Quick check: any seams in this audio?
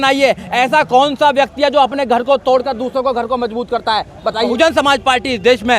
yes; 1 cut; at 4.5 s

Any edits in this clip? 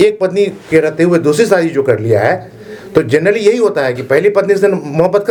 no; 0 cuts

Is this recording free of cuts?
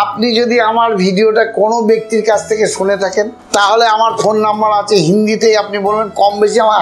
no; 1 cut; at 3.4 s

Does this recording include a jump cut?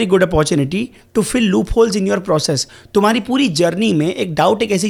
no; 0 cuts

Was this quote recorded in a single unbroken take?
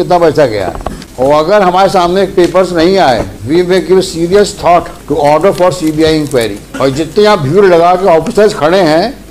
no; 4 cuts; at 1.0 s, 3.3 s, 5.0 s, 6.6 s

